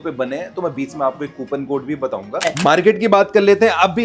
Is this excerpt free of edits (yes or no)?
no